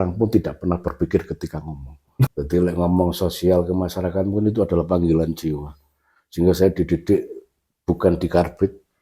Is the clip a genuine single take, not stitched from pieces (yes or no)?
no